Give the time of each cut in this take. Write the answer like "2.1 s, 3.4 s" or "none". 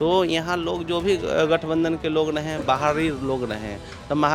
none

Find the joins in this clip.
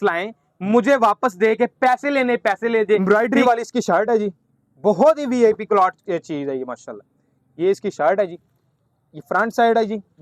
3.0 s

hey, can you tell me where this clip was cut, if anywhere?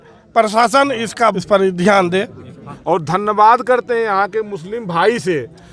1.4 s, 2.7 s

